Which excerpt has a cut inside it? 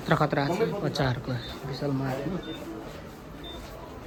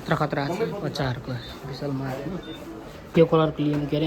second; 1 cut; at 3.1 s

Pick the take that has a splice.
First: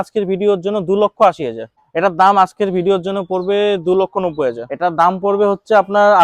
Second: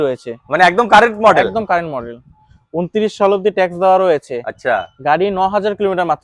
first; 2 cuts; at 1.8 s, 4.7 s

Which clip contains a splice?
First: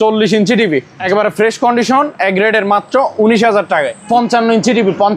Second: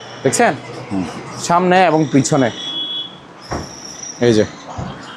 first; 2 cuts; at 0.9 s, 4.0 s

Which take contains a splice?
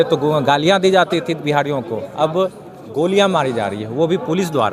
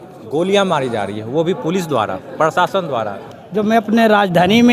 second; 1 cut; at 3.2 s

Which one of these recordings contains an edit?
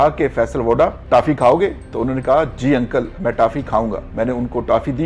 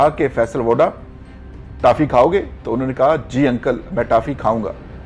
first; 2 cuts; at 1.0 s, 4.0 s

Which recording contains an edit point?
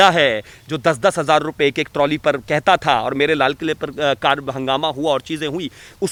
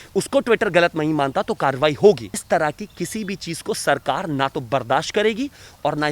second; 1 cut; at 2.4 s

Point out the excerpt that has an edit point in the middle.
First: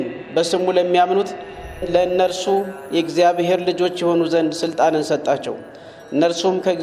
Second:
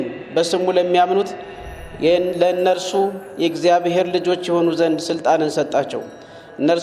first; 1 cut; at 1.8 s

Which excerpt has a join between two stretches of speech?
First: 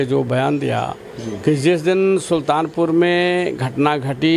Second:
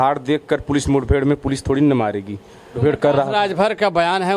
second; 1 cut; at 2.8 s

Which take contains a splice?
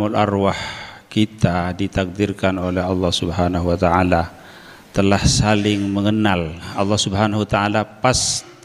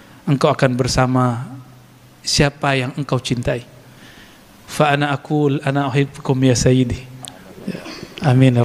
first; 1 cut; at 6.7 s

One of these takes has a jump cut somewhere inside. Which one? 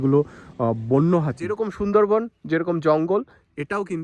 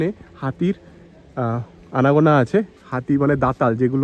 first; 1 cut; at 1.4 s

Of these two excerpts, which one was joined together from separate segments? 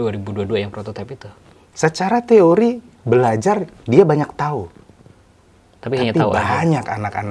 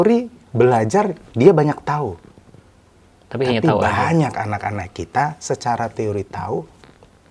first; 1 cut; at 1.6 s

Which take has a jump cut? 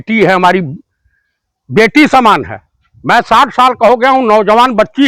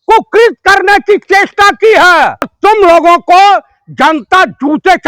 second; 1 cut; at 2.5 s

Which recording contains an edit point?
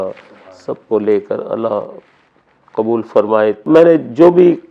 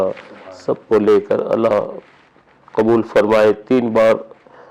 first; 1 cut; at 3.7 s

